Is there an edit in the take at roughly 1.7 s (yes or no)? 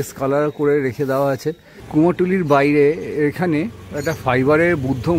yes